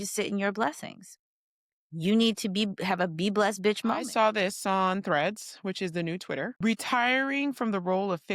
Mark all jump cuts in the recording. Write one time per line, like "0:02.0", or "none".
0:04.0
0:06.6